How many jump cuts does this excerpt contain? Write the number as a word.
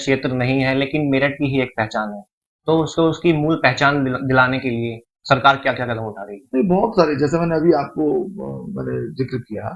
zero